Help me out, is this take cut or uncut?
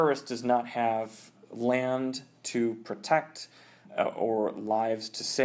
uncut